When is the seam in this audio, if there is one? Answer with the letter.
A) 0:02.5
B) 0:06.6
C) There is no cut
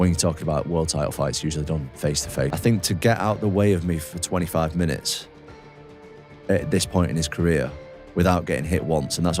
A